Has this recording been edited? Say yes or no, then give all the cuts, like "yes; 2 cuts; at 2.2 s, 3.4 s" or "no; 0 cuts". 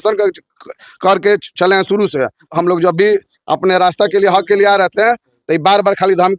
yes; 1 cut; at 2.5 s